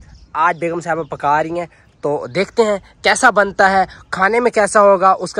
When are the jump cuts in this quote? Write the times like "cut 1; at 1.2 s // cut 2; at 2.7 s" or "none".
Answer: none